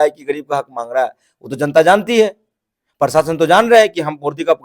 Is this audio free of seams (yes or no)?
yes